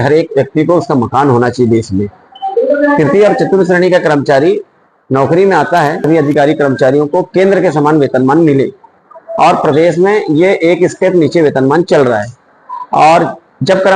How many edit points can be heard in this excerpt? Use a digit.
1